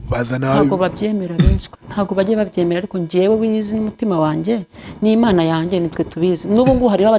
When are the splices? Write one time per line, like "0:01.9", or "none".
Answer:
0:01.7